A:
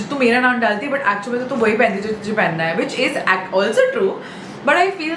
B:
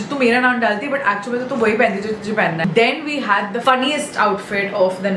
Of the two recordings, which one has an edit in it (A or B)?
B